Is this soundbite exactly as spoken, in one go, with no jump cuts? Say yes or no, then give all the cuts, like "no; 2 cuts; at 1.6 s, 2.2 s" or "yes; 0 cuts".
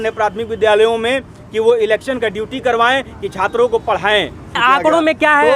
no; 1 cut; at 4.6 s